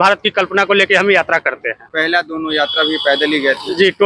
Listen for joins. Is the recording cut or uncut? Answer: uncut